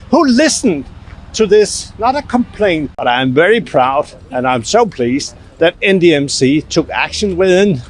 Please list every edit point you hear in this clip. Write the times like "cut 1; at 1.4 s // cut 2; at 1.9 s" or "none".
cut 1; at 2.9 s